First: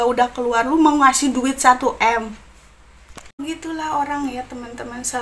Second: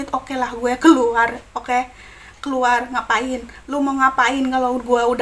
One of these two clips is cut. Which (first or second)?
first